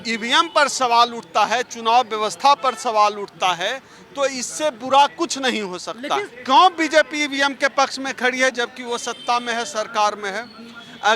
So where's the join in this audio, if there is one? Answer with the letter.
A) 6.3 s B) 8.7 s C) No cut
A